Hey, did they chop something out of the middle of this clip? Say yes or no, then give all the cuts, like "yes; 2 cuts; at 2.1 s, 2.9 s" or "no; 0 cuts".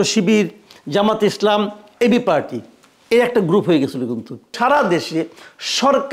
yes; 1 cut; at 4.5 s